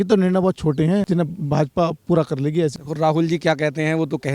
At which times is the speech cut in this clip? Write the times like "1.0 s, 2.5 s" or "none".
1.1 s, 2.7 s

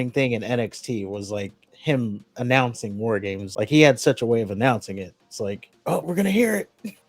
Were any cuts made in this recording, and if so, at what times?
3.4 s, 6.0 s

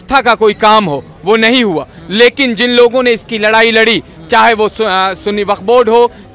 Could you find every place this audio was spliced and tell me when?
none

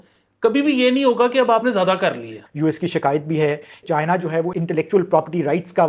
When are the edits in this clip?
2.4 s, 4.0 s

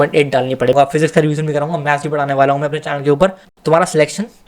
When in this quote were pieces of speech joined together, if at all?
0.7 s, 3.5 s

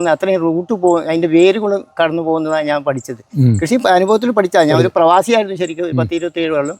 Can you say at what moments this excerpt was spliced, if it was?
none

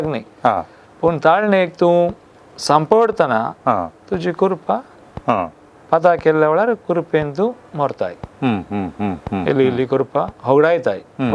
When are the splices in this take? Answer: none

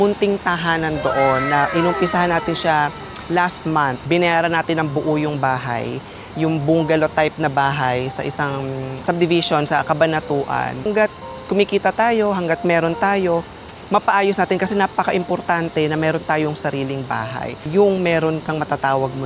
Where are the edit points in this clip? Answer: 4.0 s, 10.9 s, 17.6 s

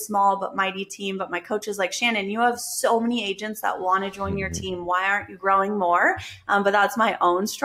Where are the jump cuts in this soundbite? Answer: none

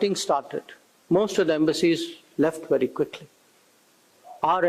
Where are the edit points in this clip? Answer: none

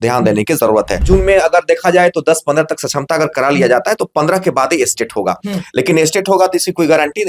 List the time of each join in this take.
1.0 s

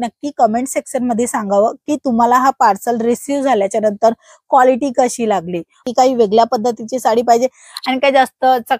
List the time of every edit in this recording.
5.8 s

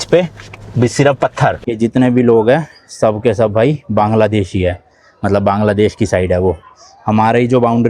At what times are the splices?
1.7 s

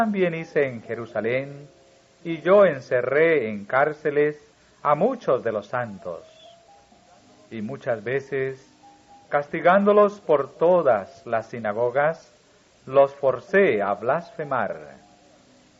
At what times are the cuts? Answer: 2.2 s

